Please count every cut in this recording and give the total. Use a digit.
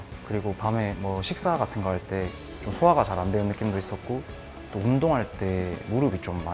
0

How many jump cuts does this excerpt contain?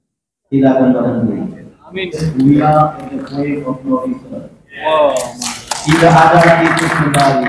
1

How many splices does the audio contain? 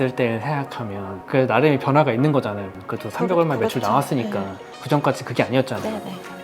2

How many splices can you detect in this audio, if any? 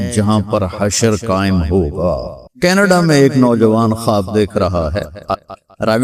1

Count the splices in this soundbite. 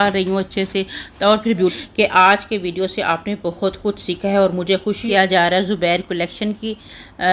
2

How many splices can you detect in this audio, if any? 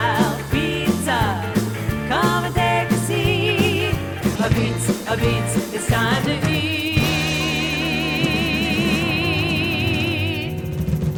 0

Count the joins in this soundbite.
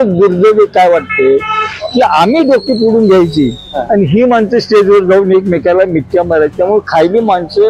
0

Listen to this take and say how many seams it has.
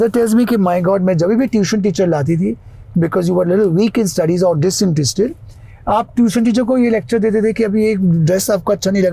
0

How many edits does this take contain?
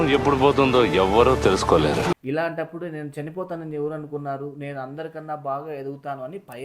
1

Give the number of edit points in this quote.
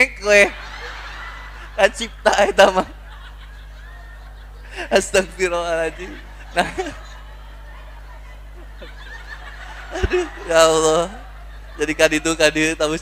0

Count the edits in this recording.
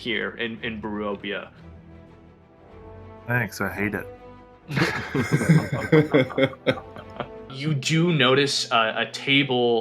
2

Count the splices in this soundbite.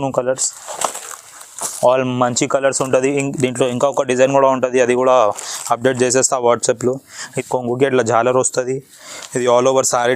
1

